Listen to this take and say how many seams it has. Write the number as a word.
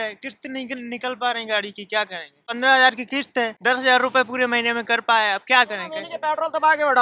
three